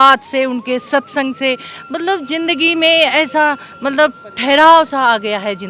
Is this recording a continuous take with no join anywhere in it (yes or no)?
yes